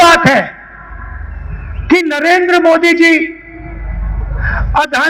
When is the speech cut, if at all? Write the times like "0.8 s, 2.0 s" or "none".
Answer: none